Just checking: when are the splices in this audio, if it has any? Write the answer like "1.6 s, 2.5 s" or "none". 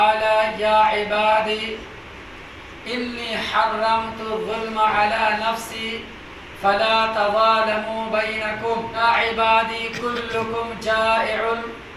9.0 s